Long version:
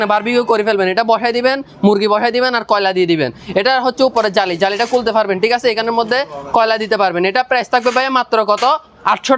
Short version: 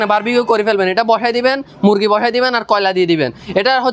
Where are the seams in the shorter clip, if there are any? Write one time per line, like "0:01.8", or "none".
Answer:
none